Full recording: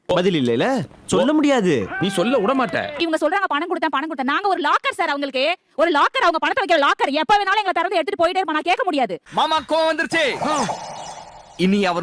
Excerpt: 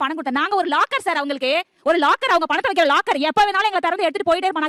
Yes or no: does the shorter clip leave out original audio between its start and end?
no